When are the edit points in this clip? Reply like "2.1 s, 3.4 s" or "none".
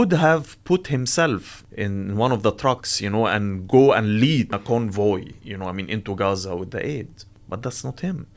1.6 s, 4.5 s, 7.4 s

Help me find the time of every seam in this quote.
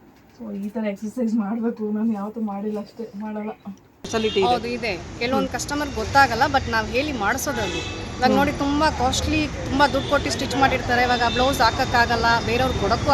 4.1 s

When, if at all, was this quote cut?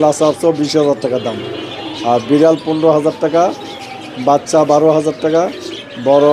none

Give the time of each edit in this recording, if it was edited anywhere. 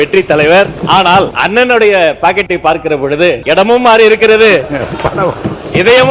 0.9 s, 3.4 s

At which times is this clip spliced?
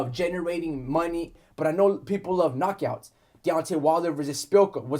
1.4 s

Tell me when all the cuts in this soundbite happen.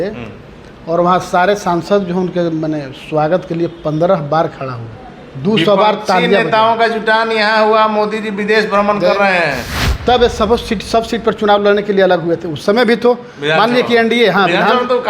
9.7 s

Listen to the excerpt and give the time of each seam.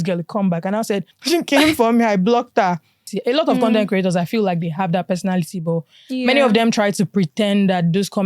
1.1 s, 3.1 s

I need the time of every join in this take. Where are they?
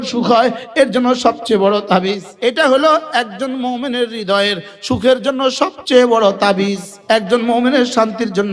2.3 s, 6.9 s

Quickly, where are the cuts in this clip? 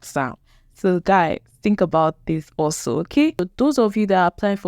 3.5 s

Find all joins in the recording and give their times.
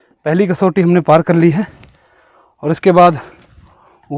none

